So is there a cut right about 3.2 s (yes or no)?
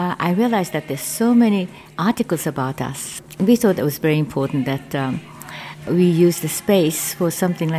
yes